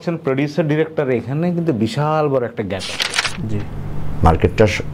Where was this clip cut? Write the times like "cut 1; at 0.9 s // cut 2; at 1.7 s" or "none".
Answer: cut 1; at 3.4 s